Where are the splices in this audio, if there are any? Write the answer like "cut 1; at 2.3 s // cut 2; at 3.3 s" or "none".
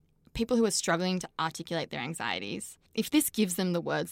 cut 1; at 2.8 s